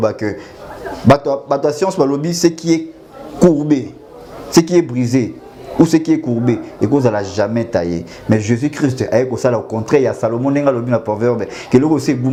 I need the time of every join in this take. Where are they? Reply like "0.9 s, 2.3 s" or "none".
none